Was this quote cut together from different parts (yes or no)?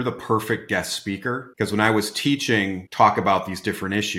yes